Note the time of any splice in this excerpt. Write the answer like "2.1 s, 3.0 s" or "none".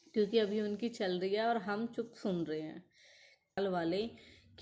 3.6 s

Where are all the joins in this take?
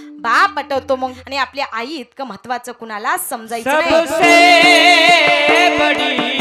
1.1 s

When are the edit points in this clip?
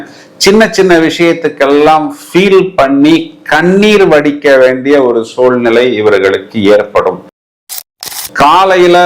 7.6 s

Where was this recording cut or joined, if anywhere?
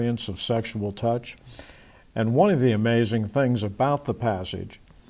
1.3 s

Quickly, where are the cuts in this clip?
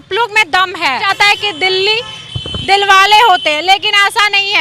1.1 s

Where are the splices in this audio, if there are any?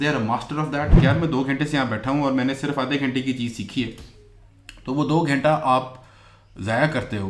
0.9 s

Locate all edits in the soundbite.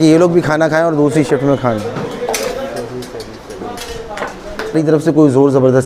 4.7 s

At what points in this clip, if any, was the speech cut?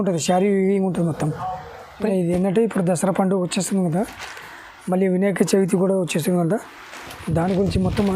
2.1 s

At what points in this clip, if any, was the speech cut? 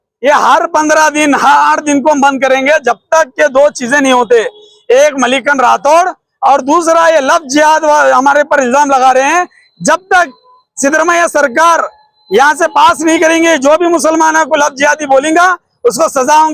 none

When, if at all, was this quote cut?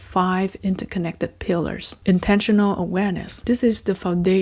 1.9 s, 3.3 s

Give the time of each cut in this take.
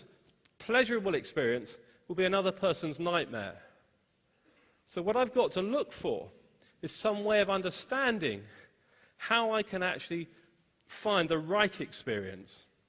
11.4 s

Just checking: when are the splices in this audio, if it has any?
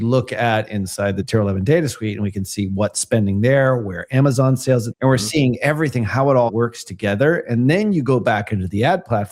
1.2 s, 4.9 s, 6.5 s

